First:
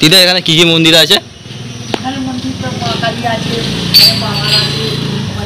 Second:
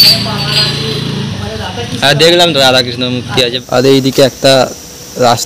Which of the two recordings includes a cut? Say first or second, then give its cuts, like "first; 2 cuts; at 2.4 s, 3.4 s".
second; 1 cut; at 3.5 s